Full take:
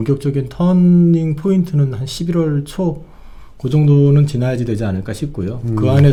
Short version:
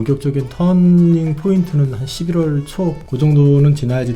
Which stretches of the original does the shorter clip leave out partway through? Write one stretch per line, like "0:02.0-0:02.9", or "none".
0:03.1-0:03.6

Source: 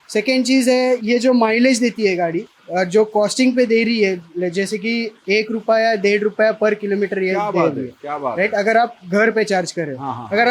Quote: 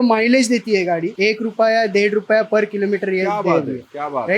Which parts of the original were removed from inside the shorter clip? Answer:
0:02.4-0:05.2

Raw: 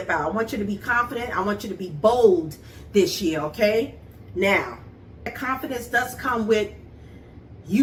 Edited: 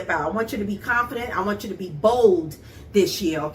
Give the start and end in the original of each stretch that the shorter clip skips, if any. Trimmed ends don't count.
none

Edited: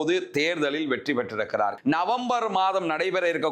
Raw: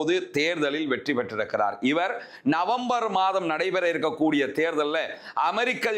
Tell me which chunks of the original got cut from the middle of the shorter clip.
0:01.8-0:02.4

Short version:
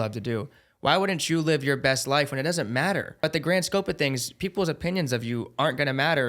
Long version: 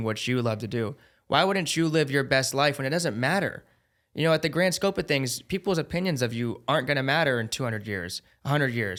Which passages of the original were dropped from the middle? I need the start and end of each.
0:03.7-0:04.3

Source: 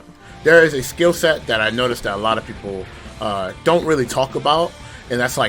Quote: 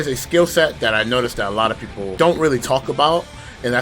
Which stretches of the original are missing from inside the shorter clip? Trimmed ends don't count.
0:02.8-0:03.6

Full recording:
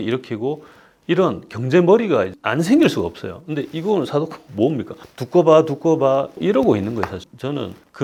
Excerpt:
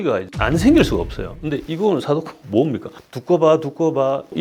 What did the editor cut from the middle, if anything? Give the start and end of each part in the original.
none

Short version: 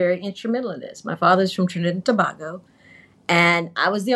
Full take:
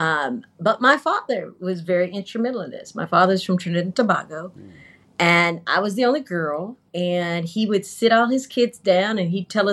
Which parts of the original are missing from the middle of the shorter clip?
none

